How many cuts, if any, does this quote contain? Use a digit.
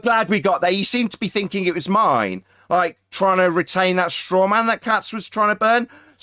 0